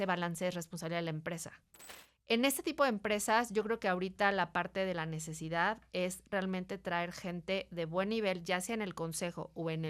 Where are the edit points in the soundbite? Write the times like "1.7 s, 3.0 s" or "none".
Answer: 1.9 s